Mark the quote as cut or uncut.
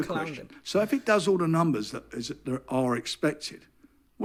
uncut